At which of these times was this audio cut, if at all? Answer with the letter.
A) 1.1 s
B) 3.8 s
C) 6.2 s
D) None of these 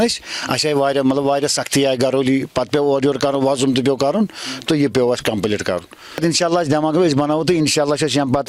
C